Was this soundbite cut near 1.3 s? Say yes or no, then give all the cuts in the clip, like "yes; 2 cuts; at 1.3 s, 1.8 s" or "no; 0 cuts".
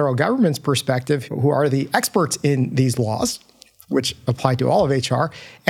yes; 1 cut; at 1.3 s